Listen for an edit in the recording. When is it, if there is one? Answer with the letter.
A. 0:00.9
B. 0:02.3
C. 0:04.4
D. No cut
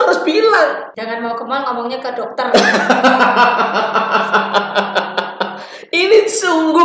A